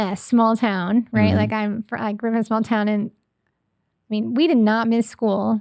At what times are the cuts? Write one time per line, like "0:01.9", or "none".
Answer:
none